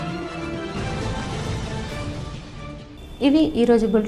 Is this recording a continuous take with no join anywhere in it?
yes; 0 cuts

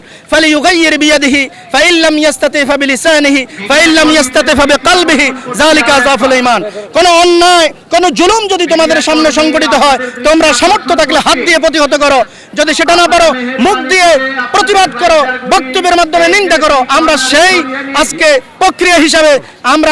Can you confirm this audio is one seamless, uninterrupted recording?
yes; 0 cuts

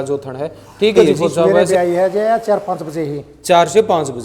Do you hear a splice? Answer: yes; 1 cut; at 1.6 s

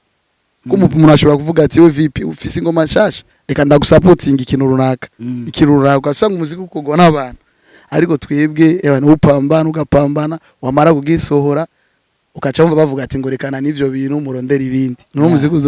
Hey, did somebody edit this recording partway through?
no; 0 cuts

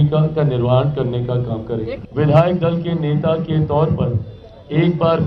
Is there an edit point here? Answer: yes; 1 cut; at 2.0 s

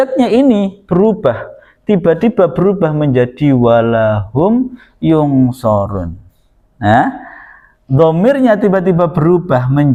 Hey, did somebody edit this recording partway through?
no; 0 cuts

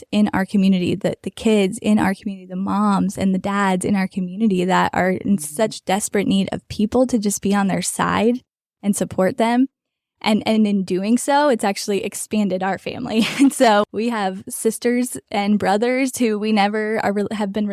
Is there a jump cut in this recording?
no; 0 cuts

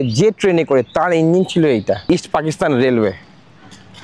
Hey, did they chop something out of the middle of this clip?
yes; 1 cut; at 2.0 s

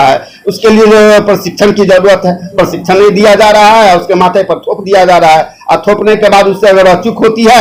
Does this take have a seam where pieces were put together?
no; 0 cuts

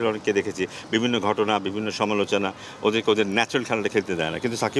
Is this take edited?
no; 0 cuts

